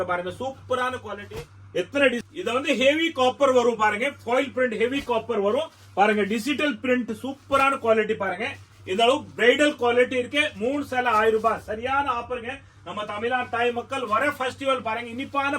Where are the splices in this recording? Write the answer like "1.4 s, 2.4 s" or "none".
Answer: 1.2 s